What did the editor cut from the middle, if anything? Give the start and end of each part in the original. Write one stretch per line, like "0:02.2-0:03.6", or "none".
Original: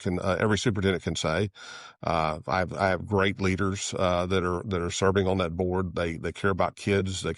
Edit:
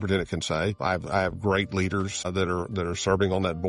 0:01.5-0:02.4
0:03.9-0:04.2